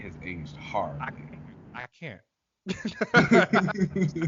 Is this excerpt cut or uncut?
uncut